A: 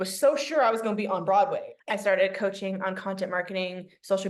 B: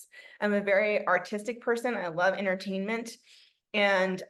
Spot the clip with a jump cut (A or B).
A